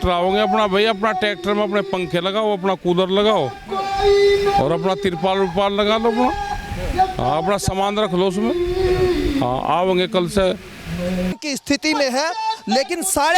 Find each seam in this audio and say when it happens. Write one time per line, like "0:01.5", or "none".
0:11.4